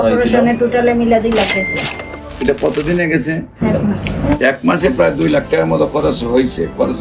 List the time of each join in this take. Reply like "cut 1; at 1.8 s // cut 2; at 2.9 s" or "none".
cut 1; at 3.6 s